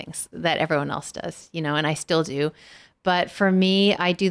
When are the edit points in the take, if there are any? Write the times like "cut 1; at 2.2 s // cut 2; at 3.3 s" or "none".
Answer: none